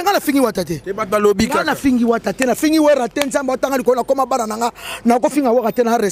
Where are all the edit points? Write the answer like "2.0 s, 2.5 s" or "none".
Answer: none